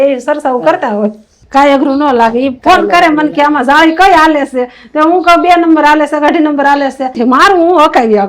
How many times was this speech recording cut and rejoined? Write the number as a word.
two